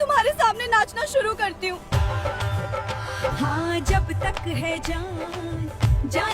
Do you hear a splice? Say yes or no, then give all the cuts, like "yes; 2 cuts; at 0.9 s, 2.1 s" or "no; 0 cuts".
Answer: yes; 1 cut; at 1.9 s